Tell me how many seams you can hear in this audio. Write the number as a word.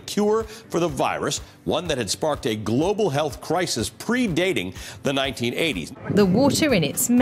one